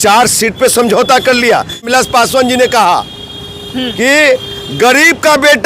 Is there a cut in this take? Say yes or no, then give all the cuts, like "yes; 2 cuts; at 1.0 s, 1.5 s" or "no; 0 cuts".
yes; 1 cut; at 1.9 s